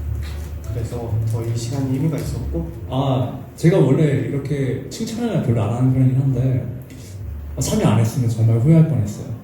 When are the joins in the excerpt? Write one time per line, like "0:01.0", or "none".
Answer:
0:02.8